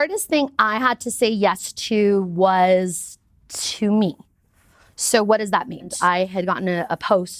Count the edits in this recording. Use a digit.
1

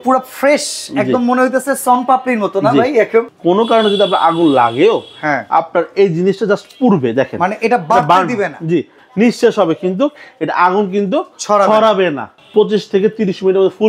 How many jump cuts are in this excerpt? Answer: 3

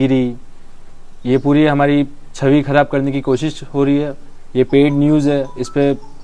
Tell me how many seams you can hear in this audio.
0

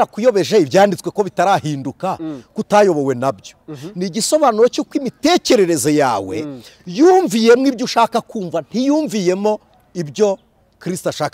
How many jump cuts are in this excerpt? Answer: 0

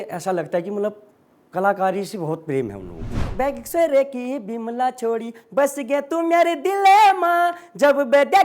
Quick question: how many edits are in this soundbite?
1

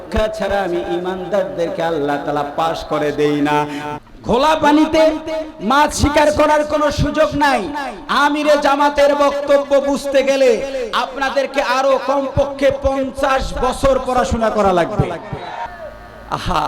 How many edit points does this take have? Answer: 2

